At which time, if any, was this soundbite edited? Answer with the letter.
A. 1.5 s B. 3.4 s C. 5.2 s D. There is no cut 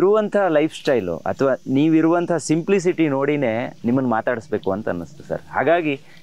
D